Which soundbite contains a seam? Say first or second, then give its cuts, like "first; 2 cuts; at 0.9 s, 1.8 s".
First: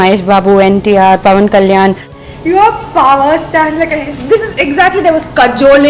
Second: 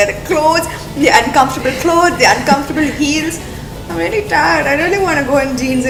first; 1 cut; at 2.1 s